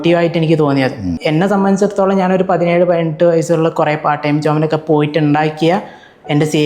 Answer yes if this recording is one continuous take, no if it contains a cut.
no